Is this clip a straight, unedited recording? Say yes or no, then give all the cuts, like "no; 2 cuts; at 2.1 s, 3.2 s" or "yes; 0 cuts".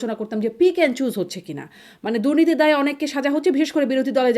yes; 0 cuts